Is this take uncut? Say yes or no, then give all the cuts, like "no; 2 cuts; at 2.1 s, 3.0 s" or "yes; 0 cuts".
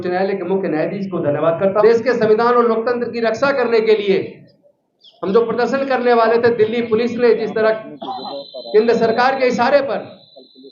no; 1 cut; at 1.8 s